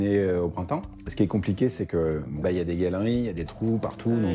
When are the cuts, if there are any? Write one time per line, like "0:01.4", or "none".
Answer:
0:01.0
0:02.4